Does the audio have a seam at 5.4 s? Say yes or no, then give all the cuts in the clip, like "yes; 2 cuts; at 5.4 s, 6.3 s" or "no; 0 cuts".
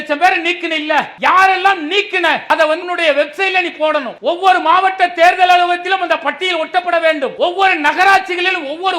no; 4 cuts; at 1.1 s, 2.6 s, 4.1 s, 7.3 s